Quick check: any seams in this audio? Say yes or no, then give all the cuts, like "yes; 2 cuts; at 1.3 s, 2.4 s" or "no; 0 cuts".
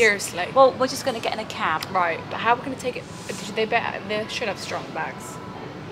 no; 0 cuts